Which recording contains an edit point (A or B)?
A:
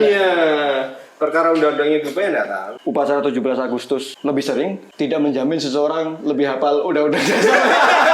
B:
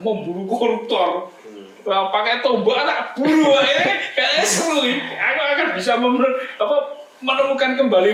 A